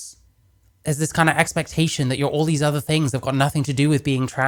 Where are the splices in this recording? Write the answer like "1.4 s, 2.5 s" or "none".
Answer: none